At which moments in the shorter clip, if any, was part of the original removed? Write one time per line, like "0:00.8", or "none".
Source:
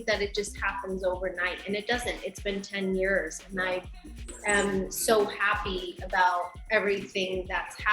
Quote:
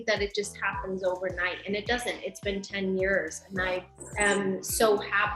0:04.0